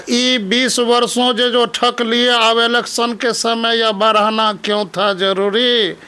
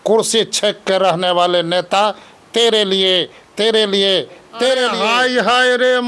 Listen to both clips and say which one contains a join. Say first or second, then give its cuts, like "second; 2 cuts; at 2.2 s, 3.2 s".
second; 1 cut; at 5.0 s